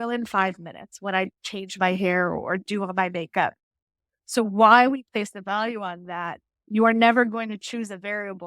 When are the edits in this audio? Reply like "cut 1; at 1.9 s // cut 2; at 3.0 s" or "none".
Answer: cut 1; at 6.5 s